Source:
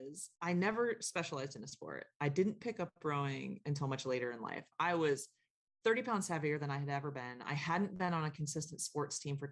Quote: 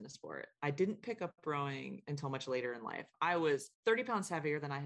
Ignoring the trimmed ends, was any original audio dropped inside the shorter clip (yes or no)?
yes